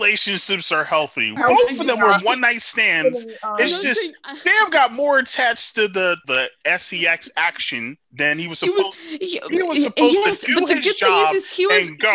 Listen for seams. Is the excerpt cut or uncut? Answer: cut